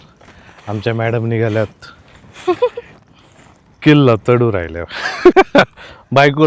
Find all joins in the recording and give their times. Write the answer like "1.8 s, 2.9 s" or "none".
5.3 s